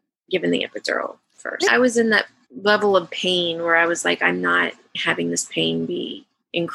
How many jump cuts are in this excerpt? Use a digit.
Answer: 1